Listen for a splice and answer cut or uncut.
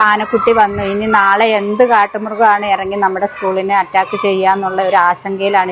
uncut